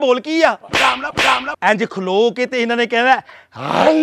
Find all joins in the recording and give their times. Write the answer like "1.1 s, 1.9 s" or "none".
1.5 s

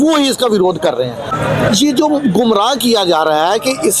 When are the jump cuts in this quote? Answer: 1.2 s

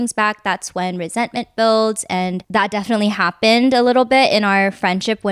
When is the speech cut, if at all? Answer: none

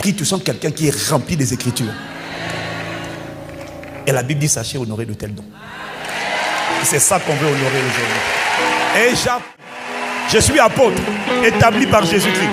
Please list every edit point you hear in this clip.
9.5 s

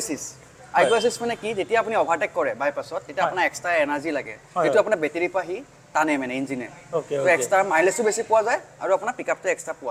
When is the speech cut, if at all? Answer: none

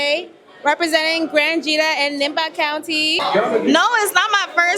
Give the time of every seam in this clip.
3.2 s

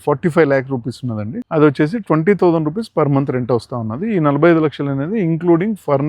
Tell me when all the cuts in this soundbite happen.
1.3 s

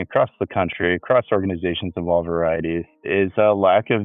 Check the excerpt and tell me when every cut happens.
3.0 s

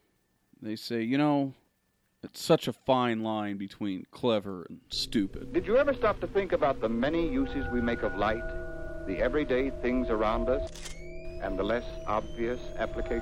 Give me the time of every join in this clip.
5.5 s

